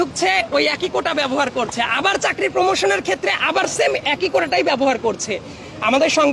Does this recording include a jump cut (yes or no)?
no